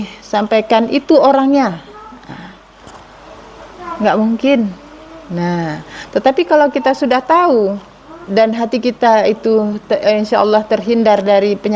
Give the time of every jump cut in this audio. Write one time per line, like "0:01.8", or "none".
0:08.2